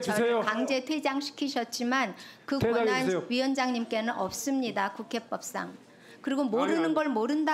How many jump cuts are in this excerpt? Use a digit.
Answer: 0